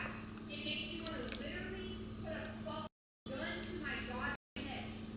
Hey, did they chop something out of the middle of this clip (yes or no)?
no